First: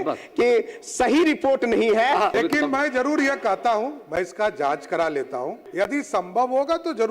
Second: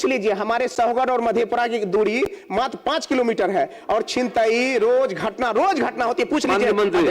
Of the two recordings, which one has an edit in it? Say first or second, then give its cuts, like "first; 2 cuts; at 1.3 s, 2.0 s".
first; 2 cuts; at 2.3 s, 5.6 s